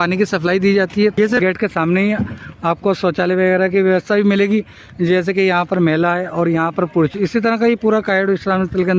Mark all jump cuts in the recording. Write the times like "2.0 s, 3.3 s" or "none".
1.4 s

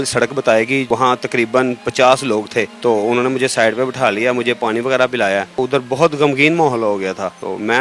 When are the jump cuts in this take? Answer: none

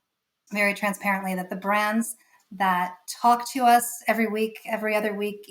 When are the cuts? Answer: none

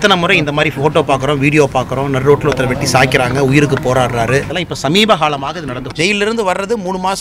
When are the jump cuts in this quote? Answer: 4.6 s, 5.8 s

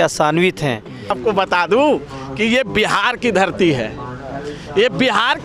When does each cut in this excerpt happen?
1.1 s

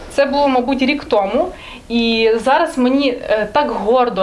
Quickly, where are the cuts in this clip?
none

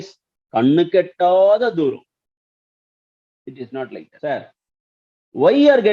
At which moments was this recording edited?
4.1 s

